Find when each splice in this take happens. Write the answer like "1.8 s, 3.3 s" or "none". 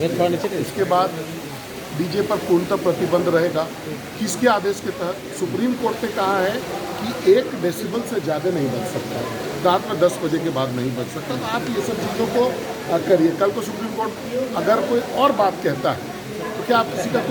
none